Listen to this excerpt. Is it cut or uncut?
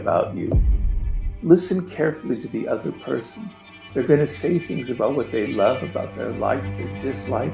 cut